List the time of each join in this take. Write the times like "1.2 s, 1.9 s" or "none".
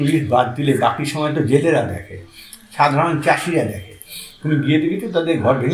none